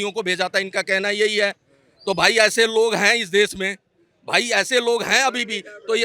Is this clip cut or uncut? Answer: uncut